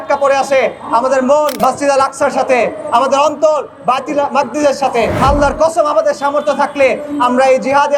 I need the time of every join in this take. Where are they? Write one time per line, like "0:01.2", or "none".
0:01.6
0:05.2